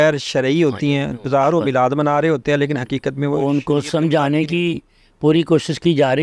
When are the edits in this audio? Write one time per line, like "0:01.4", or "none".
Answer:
none